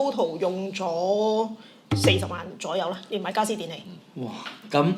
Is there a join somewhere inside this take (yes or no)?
no